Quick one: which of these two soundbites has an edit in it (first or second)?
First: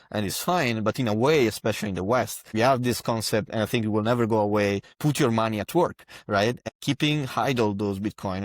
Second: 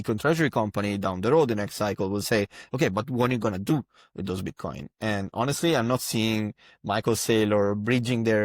first